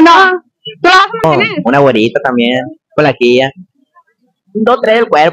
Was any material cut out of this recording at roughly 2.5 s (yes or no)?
no